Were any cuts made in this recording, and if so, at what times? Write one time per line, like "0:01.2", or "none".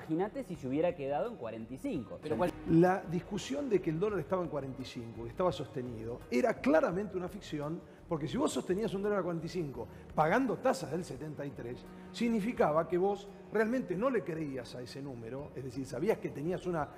0:02.5